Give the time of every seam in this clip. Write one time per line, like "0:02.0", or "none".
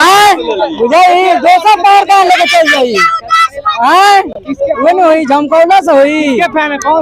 none